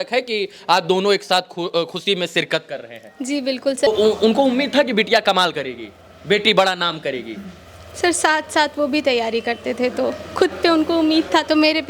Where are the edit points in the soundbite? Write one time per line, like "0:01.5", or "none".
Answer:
0:03.9

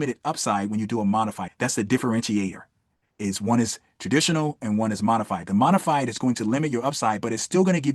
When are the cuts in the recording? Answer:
0:01.4

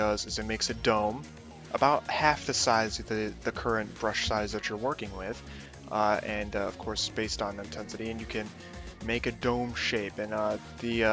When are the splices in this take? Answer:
0:06.4

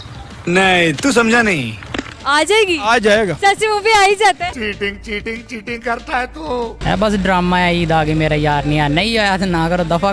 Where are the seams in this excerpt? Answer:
0:03.3
0:04.5
0:06.8

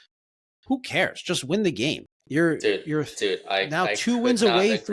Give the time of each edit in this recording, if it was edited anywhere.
none

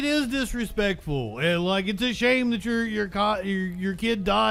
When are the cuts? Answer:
none

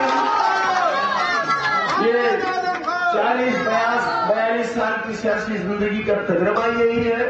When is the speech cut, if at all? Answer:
0:01.3

